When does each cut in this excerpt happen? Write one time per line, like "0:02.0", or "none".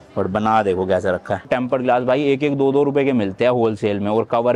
0:01.5

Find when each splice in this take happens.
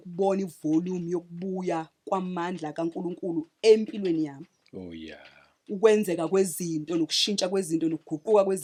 none

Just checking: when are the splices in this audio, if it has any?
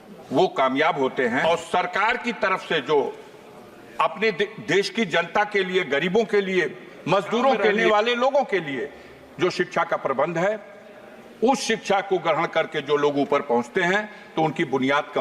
0:01.4
0:07.8

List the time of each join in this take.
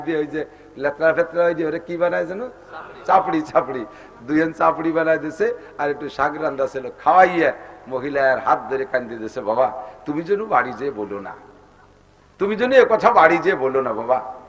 none

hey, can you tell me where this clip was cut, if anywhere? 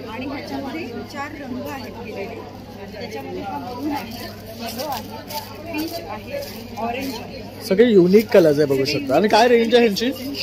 none

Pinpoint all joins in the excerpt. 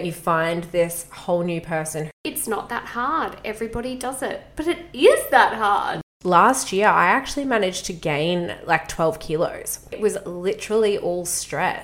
0:02.2
0:06.1
0:10.0

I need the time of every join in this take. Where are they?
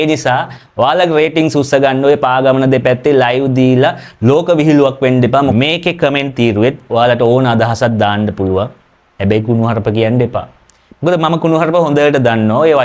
0:05.5

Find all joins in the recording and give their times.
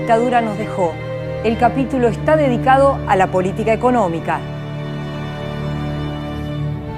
0:04.0

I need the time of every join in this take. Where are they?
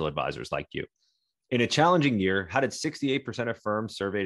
none

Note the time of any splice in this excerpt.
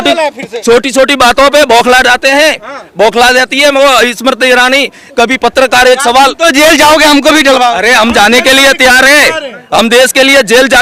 none

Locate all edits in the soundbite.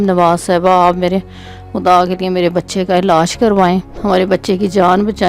0:03.9

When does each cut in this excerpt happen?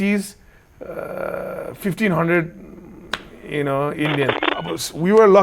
0:04.3

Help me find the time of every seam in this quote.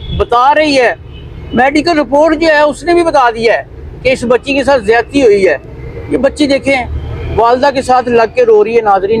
none

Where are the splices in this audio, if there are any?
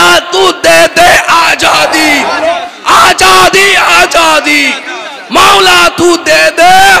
none

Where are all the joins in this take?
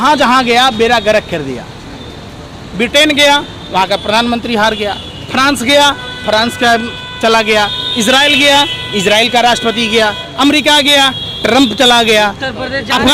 none

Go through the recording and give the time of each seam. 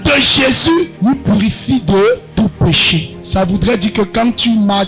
0:00.9
0:02.3
0:03.2

